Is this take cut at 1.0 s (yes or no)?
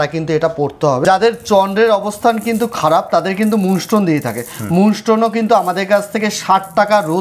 yes